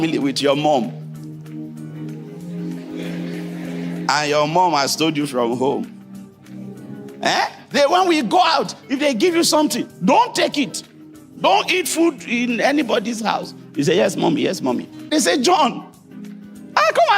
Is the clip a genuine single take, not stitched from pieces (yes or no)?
no